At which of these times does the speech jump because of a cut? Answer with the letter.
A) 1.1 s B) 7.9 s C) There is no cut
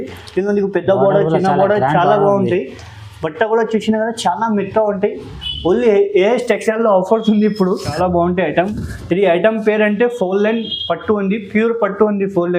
B